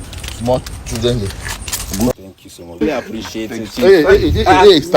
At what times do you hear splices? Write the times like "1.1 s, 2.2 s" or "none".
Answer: 2.1 s

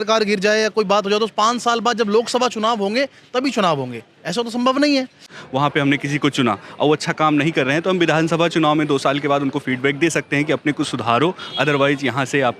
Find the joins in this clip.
5.4 s

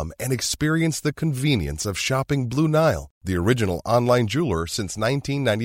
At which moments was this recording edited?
none

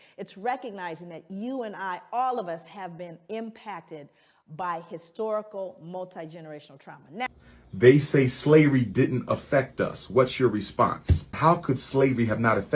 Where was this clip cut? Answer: 7.3 s

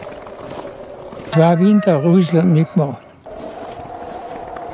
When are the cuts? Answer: 1.2 s

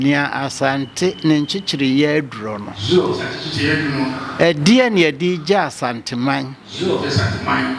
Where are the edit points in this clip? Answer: none

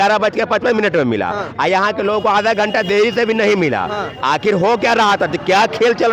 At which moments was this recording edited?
none

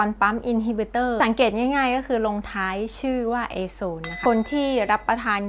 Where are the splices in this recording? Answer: 1.2 s, 4.2 s

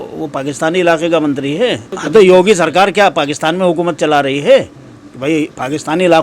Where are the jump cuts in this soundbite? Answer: 1.9 s

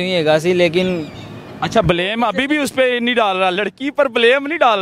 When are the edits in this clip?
none

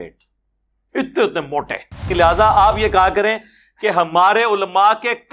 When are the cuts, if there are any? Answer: 2.1 s

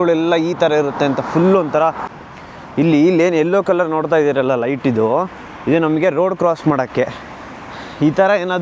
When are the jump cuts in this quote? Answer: 2.0 s

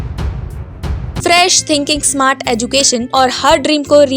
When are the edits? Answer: 1.1 s, 3.1 s

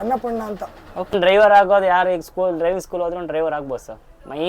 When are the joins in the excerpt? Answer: 1.1 s

